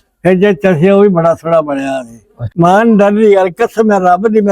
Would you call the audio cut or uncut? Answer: cut